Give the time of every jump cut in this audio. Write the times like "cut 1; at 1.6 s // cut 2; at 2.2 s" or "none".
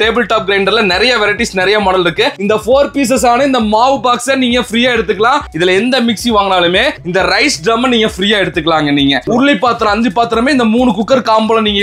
cut 1; at 2.4 s // cut 2; at 5.5 s // cut 3; at 9.3 s